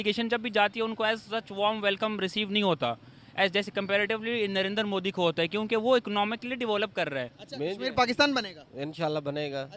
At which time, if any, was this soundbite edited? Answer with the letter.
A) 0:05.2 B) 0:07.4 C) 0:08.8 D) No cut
B